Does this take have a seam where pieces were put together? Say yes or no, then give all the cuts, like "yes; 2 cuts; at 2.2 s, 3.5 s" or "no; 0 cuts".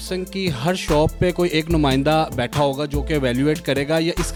no; 0 cuts